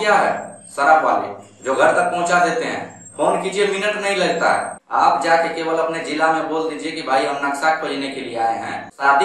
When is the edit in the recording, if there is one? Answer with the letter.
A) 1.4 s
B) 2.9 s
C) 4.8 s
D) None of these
C